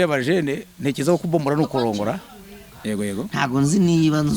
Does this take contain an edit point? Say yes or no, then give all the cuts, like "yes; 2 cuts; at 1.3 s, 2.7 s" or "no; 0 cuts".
yes; 1 cut; at 2.7 s